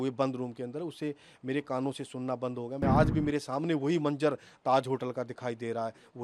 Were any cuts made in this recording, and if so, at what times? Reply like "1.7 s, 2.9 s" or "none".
2.8 s

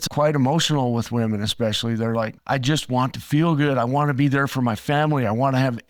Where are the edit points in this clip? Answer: none

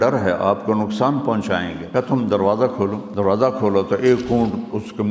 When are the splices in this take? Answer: 1.8 s, 3.0 s

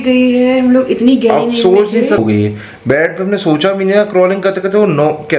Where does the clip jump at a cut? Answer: 2.2 s

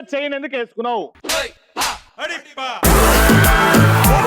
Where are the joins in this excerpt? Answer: none

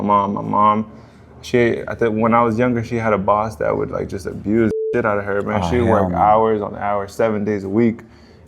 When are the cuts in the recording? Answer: none

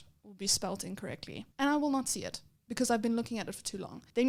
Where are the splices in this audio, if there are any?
none

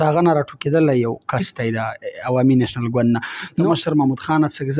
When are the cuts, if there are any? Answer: 3.6 s

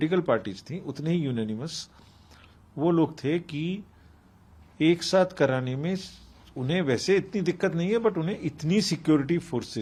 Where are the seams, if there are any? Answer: none

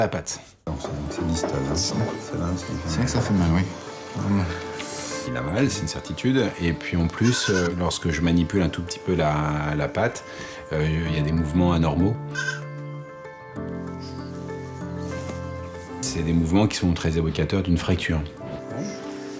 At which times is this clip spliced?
none

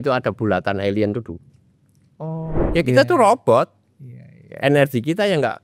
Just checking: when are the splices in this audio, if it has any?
2.6 s

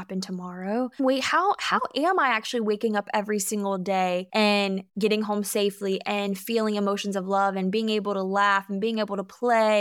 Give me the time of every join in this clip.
1.0 s, 4.6 s

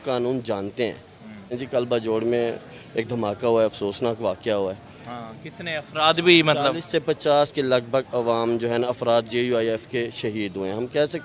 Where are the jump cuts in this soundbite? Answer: 1.5 s

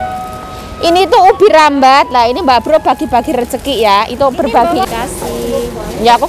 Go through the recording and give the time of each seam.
4.9 s

